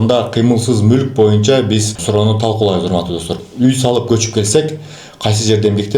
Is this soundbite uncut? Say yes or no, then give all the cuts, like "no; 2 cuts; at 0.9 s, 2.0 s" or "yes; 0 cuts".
no; 2 cuts; at 1.9 s, 3.3 s